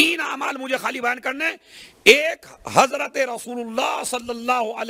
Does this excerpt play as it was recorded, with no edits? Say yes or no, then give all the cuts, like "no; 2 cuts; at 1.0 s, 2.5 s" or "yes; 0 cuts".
yes; 0 cuts